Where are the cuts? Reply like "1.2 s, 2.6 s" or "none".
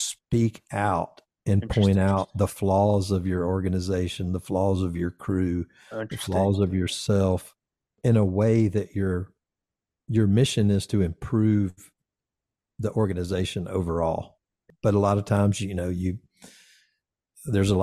7.9 s, 14.7 s